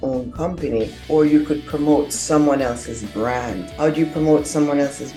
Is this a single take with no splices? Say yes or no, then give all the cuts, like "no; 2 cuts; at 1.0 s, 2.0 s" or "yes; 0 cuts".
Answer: yes; 0 cuts